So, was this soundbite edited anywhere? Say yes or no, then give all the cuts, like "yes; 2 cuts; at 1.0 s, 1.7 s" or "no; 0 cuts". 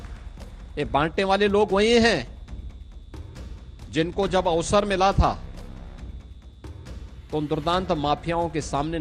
no; 0 cuts